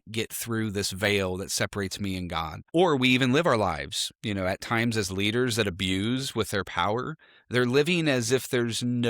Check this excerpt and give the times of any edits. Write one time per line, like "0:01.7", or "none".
0:02.7

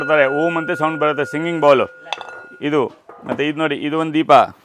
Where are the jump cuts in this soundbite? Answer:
none

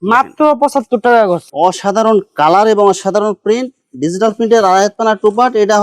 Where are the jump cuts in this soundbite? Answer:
0:01.5

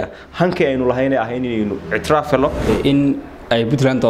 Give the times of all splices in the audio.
0:02.7

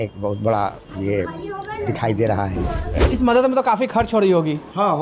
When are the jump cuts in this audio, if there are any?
0:03.0

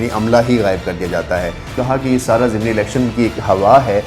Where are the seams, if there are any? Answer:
0:01.8

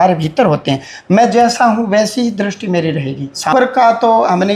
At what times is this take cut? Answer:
0:03.5

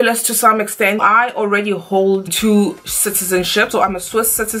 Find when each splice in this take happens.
0:01.0
0:02.3
0:03.9

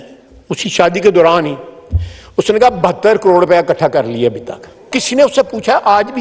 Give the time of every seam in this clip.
0:05.0

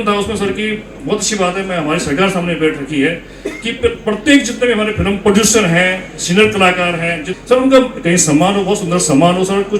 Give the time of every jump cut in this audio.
0:07.2

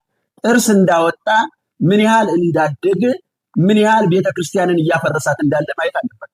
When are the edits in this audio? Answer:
none

